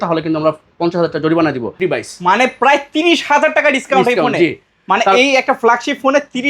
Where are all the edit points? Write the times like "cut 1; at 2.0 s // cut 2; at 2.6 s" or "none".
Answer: cut 1; at 1.7 s